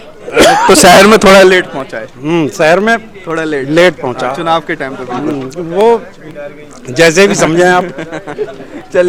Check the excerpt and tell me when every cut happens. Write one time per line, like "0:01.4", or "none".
none